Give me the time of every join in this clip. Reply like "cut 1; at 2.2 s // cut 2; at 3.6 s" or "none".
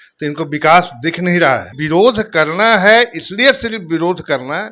cut 1; at 1.8 s